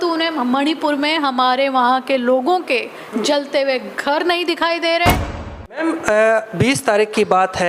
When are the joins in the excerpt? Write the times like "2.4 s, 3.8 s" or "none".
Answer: 5.3 s